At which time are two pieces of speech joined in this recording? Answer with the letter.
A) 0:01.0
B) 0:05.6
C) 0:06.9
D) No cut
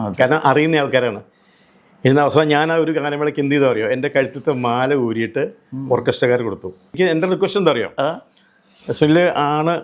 C